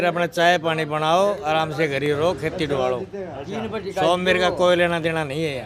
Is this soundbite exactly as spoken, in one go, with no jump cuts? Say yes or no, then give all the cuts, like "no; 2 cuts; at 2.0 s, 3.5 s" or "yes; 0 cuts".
yes; 0 cuts